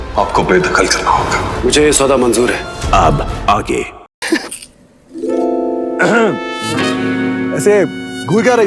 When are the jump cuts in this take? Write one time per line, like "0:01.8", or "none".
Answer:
0:04.1